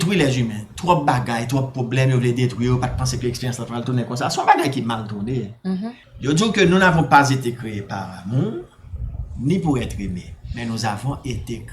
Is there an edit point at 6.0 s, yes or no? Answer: yes